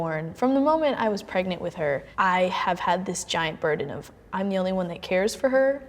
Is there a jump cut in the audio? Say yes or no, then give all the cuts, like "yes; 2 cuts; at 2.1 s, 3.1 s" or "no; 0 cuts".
yes; 1 cut; at 2.1 s